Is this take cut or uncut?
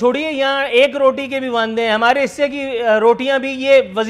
uncut